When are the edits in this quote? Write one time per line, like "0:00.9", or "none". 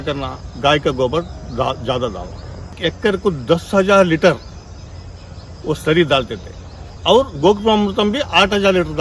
0:02.8
0:06.8

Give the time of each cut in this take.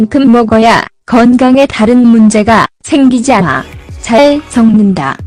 none

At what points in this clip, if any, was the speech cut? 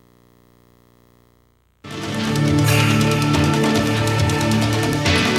none

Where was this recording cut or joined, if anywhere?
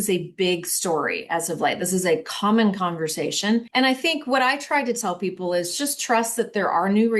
0:03.7

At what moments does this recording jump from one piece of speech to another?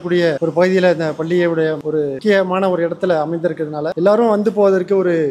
none

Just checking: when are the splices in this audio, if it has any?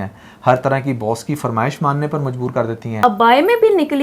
0:03.0

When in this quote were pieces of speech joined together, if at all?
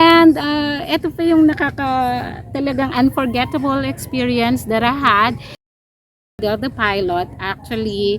0:06.4

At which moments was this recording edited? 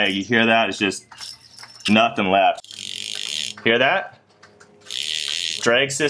0:02.7

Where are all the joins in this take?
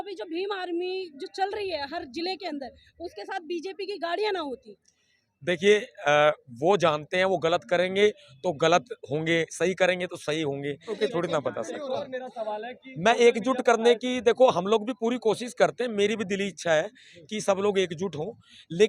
0:10.9

